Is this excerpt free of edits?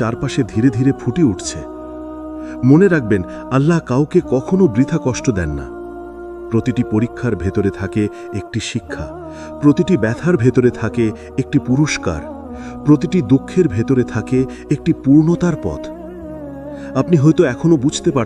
yes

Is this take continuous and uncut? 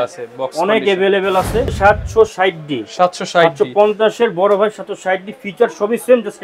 no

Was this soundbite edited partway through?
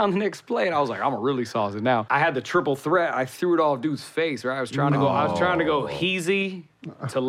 yes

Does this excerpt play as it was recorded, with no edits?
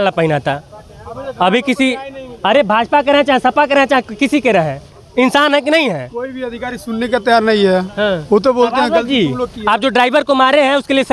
yes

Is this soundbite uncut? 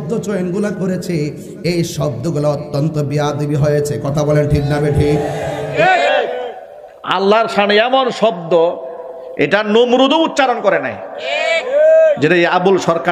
no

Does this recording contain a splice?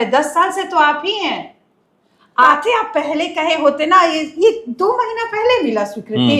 yes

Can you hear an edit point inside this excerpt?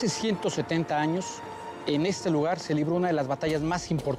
no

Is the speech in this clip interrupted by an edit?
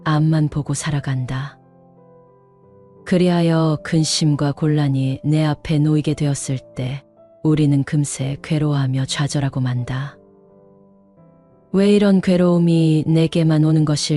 no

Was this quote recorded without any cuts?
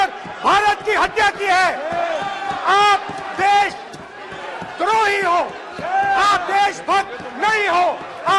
yes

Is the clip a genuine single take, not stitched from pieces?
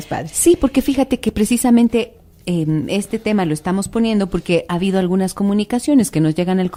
yes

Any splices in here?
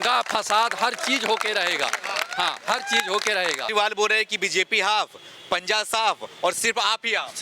yes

